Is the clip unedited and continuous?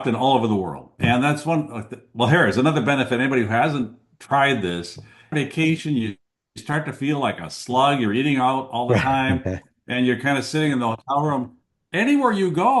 no; 1 cut; at 5.3 s

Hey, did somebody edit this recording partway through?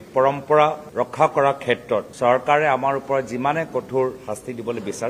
no; 0 cuts

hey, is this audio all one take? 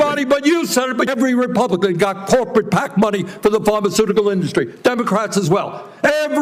no; 1 cut; at 1.1 s

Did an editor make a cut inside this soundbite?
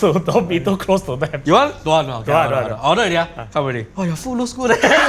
yes; 2 cuts; at 1.3 s, 3.9 s

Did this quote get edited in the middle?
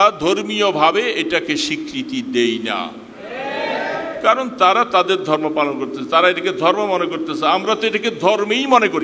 no; 0 cuts

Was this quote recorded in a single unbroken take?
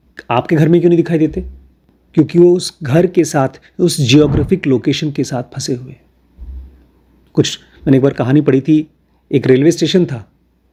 yes; 0 cuts

